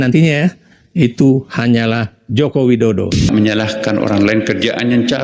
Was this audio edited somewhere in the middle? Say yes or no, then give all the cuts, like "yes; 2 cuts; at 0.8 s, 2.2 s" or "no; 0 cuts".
yes; 1 cut; at 3.3 s